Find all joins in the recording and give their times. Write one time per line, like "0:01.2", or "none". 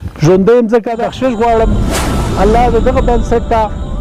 0:01.0